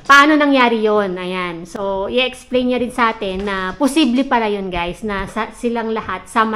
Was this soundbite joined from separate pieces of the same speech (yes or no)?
no